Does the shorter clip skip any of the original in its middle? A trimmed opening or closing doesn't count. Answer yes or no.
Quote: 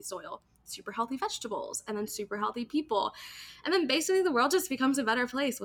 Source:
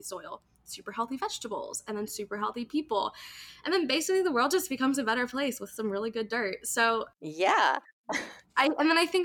no